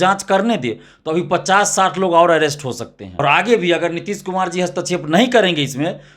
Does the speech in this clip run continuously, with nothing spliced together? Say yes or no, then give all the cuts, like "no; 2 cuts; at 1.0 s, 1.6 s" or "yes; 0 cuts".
no; 1 cut; at 3.0 s